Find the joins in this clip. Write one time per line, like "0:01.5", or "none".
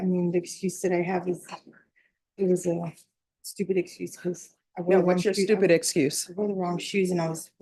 none